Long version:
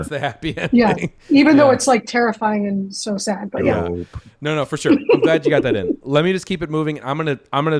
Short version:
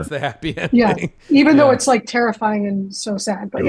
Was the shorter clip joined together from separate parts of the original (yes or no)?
no